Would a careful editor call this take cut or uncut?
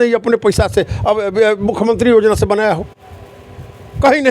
uncut